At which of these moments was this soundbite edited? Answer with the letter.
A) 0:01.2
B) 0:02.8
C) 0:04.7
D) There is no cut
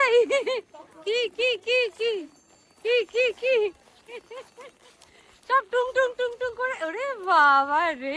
D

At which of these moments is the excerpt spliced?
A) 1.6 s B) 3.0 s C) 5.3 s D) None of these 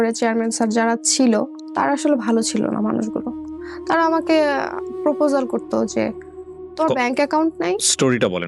A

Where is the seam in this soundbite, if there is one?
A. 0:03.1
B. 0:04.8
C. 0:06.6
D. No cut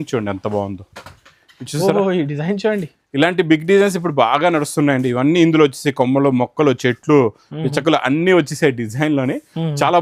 D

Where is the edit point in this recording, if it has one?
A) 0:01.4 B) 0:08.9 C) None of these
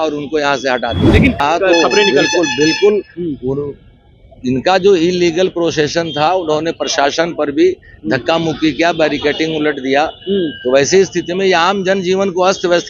A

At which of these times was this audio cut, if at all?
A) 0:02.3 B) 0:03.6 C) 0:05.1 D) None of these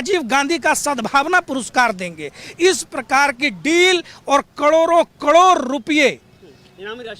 D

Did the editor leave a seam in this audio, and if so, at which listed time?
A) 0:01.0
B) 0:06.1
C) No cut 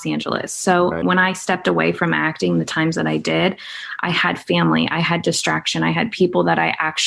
A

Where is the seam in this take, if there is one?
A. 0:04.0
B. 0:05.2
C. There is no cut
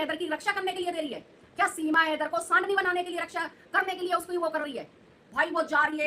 B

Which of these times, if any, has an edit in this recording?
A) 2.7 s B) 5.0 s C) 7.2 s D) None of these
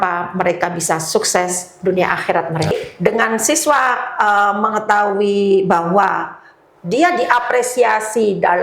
A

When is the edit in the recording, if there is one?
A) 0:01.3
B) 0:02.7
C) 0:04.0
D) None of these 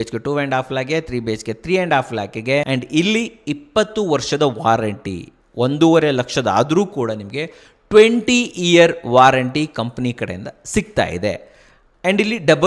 B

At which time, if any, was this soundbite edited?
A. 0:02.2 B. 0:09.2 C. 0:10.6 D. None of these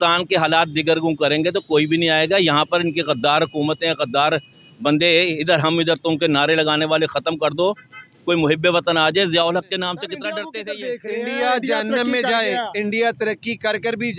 C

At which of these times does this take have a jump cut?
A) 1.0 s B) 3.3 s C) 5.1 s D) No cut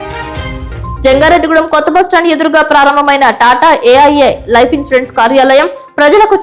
D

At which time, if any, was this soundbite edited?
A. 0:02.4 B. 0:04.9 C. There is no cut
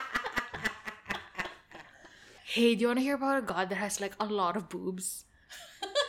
A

